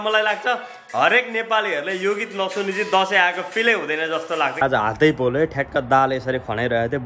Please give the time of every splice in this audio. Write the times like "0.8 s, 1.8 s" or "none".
4.7 s

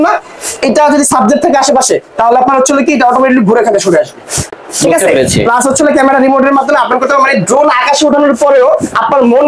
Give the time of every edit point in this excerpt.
none

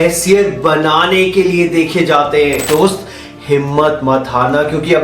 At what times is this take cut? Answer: 2.6 s

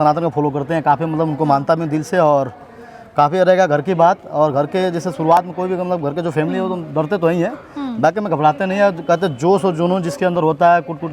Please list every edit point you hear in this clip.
none

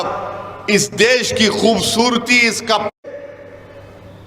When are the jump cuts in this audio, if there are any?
2.9 s

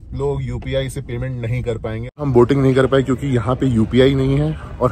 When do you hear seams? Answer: 2.2 s

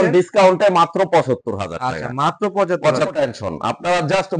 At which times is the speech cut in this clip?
3.1 s

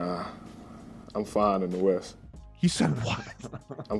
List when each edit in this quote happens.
none

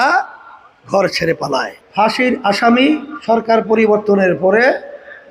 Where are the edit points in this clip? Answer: 1.8 s

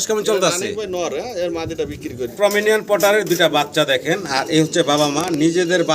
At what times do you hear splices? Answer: 2.3 s

